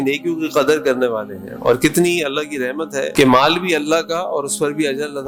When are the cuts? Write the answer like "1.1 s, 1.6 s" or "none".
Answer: none